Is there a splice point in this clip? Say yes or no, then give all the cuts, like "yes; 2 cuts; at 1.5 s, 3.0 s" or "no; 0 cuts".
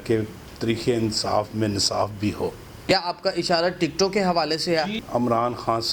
yes; 2 cuts; at 2.9 s, 5.0 s